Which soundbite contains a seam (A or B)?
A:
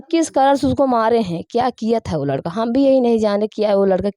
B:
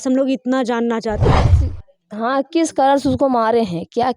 B